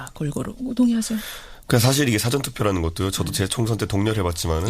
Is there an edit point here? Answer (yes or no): yes